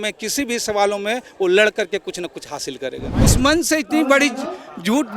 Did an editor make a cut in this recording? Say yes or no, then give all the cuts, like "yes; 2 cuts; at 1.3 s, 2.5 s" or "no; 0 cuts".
yes; 1 cut; at 3.1 s